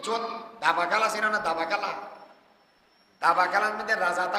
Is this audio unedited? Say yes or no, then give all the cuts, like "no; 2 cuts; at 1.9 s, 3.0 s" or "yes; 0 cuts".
yes; 0 cuts